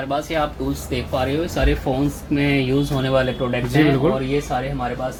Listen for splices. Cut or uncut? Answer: uncut